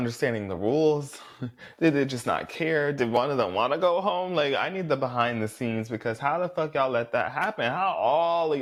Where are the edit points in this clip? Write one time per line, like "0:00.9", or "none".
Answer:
none